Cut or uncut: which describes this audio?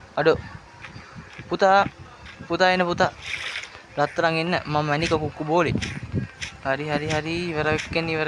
uncut